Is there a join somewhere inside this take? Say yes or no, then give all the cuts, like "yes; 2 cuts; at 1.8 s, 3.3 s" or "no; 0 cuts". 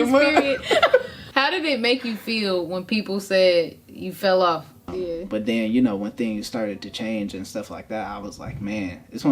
yes; 2 cuts; at 1.2 s, 4.9 s